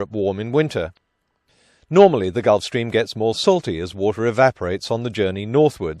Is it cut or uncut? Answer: cut